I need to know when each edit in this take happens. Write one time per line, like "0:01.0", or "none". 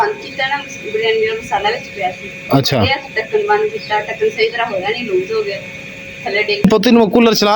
0:06.6